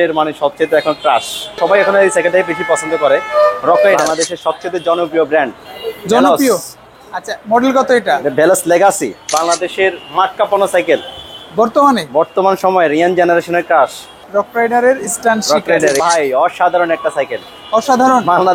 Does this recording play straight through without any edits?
no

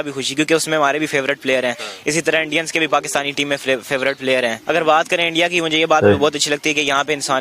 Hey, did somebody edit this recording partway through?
yes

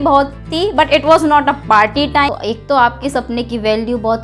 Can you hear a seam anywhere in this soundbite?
yes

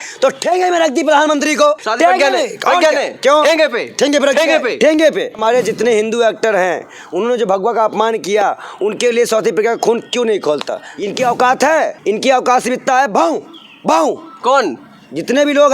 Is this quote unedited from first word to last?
no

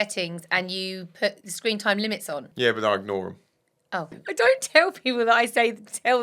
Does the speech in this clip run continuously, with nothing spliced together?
no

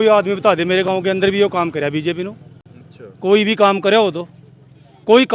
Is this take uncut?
yes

